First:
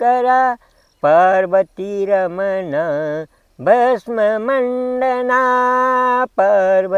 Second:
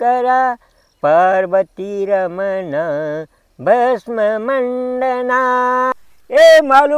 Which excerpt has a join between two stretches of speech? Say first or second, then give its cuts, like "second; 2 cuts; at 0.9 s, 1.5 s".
second; 1 cut; at 5.9 s